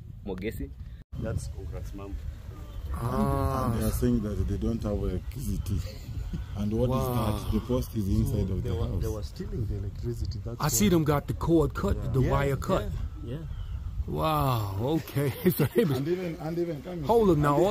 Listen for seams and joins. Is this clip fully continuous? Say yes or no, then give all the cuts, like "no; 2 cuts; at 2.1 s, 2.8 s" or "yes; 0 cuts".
no; 1 cut; at 1.1 s